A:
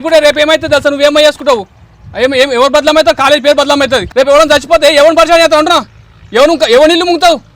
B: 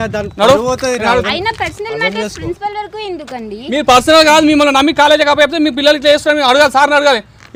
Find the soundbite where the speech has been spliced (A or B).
A